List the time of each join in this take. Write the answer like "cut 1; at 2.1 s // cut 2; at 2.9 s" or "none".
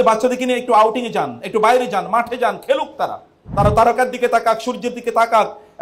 cut 1; at 3.4 s